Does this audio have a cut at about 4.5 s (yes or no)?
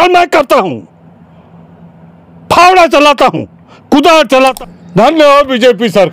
yes